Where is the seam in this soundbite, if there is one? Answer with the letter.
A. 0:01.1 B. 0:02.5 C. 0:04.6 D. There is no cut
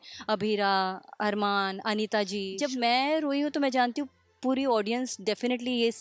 B